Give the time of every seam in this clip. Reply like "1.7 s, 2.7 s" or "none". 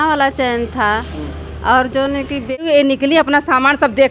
2.6 s